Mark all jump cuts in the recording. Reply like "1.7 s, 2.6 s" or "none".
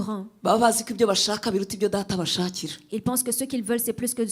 none

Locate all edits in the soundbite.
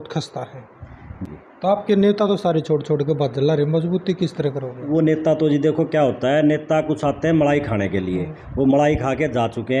1.1 s

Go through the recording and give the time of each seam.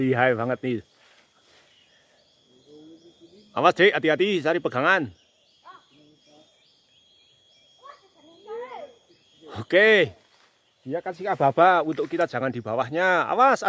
none

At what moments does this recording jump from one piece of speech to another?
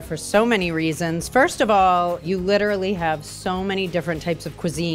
none

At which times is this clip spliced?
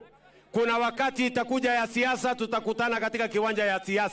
none

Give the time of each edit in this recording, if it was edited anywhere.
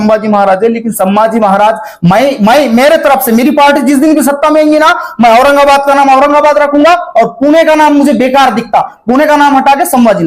none

